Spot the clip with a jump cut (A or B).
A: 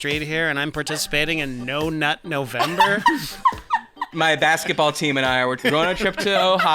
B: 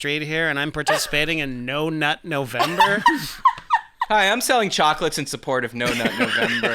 A